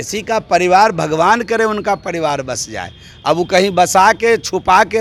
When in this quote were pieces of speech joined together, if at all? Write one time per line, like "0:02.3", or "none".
none